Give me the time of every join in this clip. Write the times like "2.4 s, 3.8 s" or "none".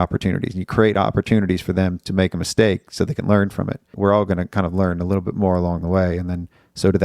3.9 s